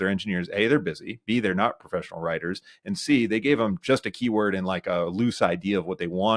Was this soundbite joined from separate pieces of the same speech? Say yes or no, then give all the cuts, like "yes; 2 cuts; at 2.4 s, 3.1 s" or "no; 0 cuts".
no; 0 cuts